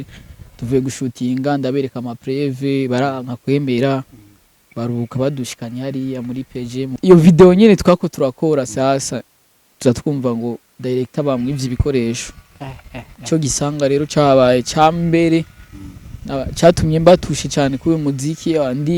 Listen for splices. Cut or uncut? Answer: cut